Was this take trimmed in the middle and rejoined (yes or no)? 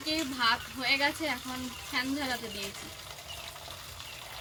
no